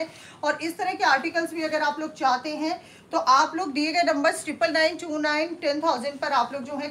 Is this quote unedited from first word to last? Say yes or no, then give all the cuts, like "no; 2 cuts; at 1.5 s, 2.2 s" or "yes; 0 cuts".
yes; 0 cuts